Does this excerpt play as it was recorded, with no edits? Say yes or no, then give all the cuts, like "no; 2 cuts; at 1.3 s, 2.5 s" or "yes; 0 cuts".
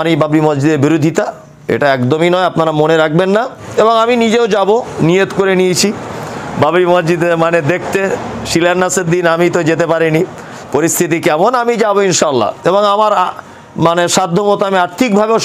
no; 1 cut; at 3.6 s